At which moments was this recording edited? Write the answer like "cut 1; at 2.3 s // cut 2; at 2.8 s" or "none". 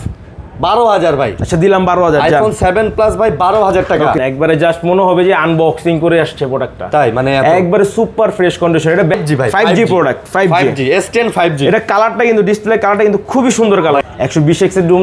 cut 1; at 4.2 s // cut 2; at 9.2 s // cut 3; at 14.0 s